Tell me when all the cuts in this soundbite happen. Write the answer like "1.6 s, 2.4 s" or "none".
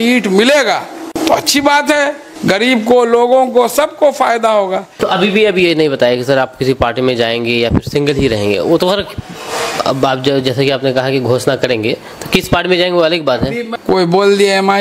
1.1 s, 2.3 s, 4.9 s, 13.6 s